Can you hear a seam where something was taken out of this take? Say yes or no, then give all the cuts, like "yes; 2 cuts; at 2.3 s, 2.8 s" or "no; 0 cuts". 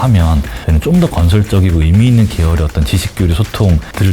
no; 0 cuts